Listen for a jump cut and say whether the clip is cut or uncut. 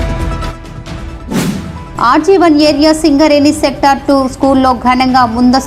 cut